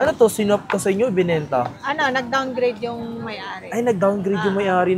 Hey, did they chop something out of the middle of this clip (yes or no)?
no